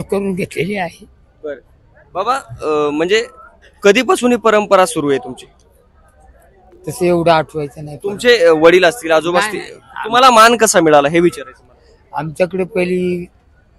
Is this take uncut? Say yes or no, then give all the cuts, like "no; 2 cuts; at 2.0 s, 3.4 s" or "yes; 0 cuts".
yes; 0 cuts